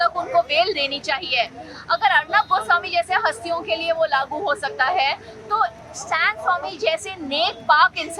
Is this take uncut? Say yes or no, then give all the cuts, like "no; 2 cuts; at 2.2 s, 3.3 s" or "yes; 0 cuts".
yes; 0 cuts